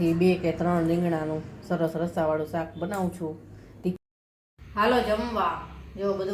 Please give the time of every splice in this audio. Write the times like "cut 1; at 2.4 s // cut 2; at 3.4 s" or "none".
cut 1; at 4.0 s